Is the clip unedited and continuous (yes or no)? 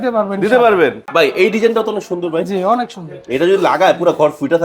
no